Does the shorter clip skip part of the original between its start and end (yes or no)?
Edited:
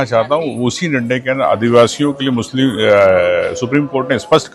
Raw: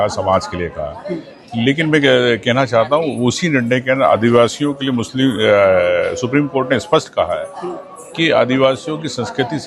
no